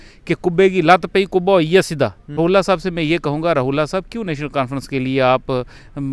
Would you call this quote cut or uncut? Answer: cut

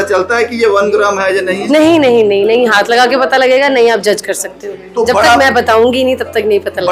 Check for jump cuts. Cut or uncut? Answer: uncut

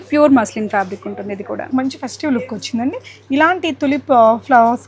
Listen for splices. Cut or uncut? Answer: cut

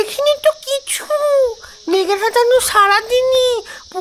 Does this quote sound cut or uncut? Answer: uncut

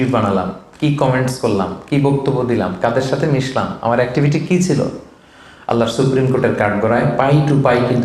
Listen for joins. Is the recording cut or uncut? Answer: uncut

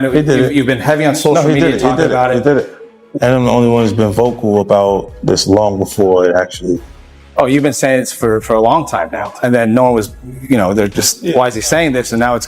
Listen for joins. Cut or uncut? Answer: uncut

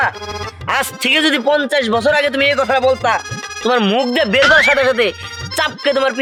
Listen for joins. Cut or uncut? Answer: uncut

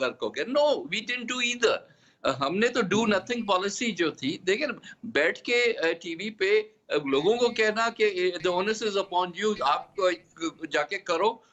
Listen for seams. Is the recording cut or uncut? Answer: uncut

